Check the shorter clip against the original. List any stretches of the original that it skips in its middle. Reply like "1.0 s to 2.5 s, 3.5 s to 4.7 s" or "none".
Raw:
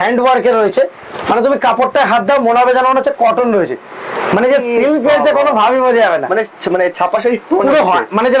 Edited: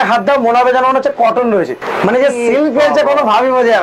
3.8 s to 4.1 s